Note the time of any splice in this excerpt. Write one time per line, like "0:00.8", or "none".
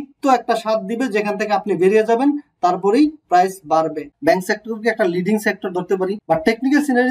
0:04.1
0:06.2